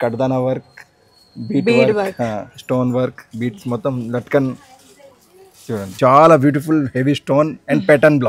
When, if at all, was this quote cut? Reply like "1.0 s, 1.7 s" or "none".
5.9 s